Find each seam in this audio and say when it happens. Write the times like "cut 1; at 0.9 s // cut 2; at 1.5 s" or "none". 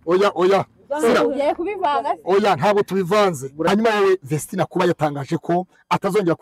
cut 1; at 3.6 s